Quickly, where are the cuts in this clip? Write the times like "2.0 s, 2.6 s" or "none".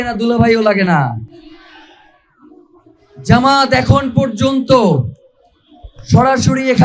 none

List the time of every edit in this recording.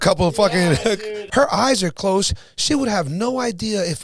1.1 s

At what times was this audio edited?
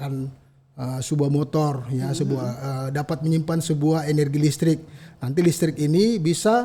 none

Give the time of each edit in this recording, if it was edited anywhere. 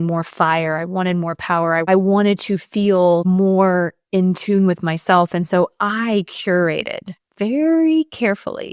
none

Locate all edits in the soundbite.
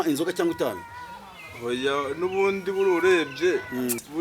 none

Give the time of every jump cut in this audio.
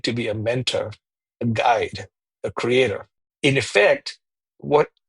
3.2 s

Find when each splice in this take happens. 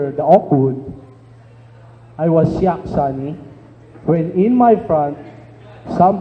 2.9 s

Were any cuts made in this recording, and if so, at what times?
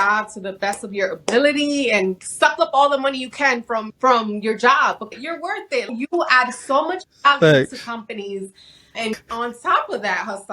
2.2 s, 3.9 s, 5.4 s, 9.2 s

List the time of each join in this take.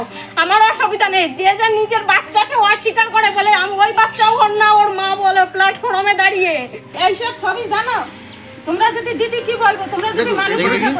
6.9 s

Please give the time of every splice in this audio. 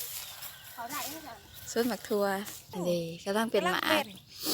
2.6 s

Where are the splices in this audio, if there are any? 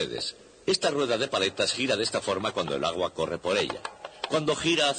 none

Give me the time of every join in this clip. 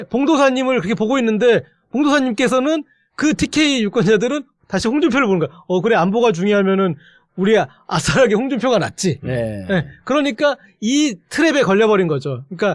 none

